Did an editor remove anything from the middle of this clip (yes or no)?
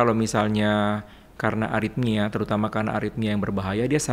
no